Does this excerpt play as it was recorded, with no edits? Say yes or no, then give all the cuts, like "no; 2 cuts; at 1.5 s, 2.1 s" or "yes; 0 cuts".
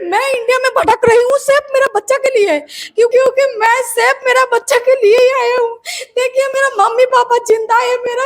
no; 1 cut; at 3.1 s